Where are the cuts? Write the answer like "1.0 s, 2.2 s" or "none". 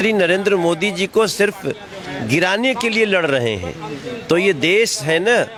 none